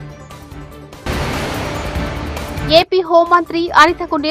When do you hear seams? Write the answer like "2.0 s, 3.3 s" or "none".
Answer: 1.0 s, 2.6 s